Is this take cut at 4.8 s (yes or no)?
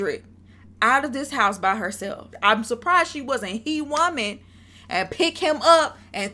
no